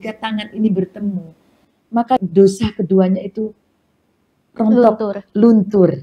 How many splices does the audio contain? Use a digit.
1